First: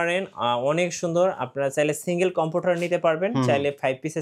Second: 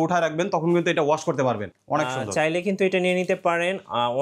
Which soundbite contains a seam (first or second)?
second